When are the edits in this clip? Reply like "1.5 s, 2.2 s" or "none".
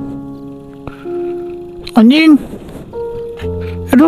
1.9 s